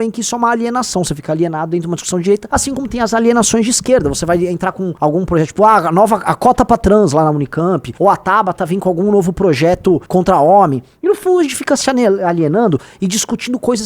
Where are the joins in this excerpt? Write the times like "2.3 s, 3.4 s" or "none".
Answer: 2.4 s, 4.9 s, 7.9 s, 10.0 s